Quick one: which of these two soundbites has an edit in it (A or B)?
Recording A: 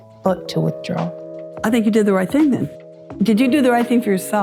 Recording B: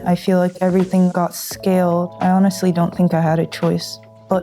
B